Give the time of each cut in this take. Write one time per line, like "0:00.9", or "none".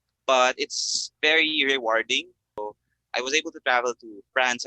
0:02.4

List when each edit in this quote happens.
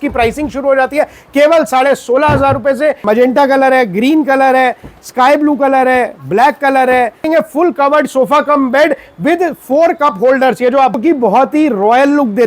0:03.0
0:07.2
0:11.0

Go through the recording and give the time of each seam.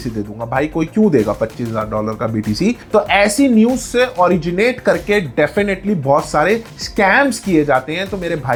none

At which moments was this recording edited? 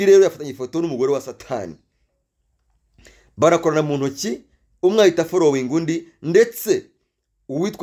none

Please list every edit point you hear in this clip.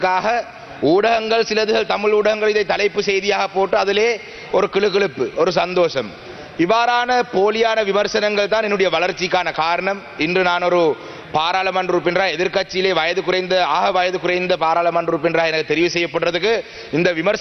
none

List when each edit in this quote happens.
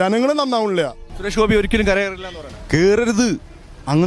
0:01.0

